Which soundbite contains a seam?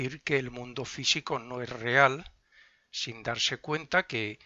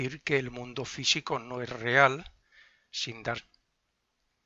first; 1 cut; at 3.4 s

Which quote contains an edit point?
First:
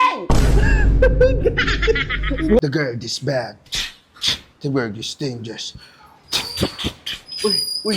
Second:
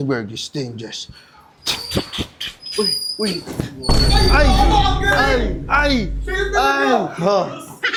first; 1 cut; at 2.6 s

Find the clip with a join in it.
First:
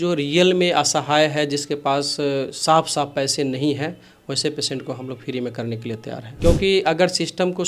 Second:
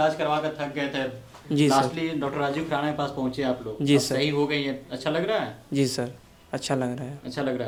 first; 1 cut; at 6.3 s

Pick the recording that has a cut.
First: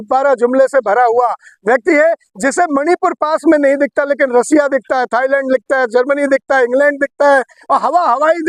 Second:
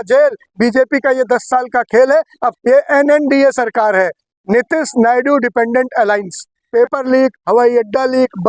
second; 2 cuts; at 2.5 s, 6.6 s

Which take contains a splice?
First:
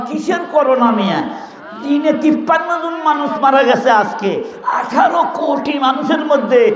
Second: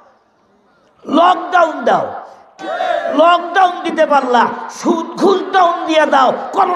second; 1 cut; at 2.6 s

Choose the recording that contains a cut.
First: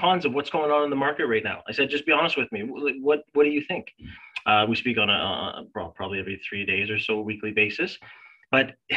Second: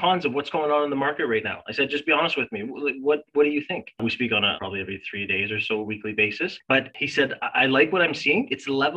second; 2 cuts; at 4.3 s, 6.9 s

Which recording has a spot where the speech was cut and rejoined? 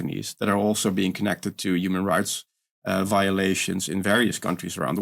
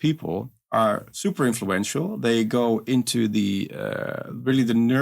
second; 1 cut; at 2.2 s

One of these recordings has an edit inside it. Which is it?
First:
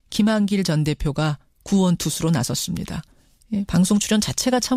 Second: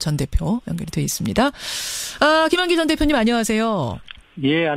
second; 1 cut; at 1.9 s

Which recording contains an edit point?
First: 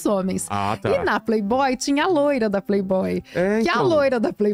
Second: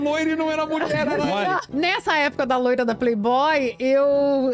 second; 1 cut; at 1.7 s

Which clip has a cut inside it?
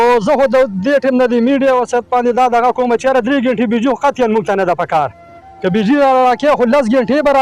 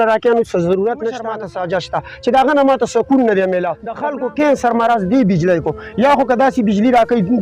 second; 2 cuts; at 1.3 s, 3.9 s

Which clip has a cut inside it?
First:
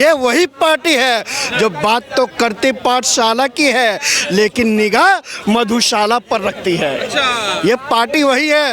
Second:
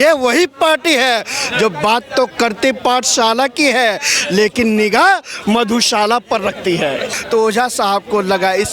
second; 1 cut; at 7.2 s

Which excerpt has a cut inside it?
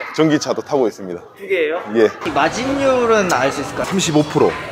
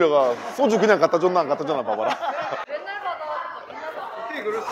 first; 2 cuts; at 2.2 s, 3.9 s

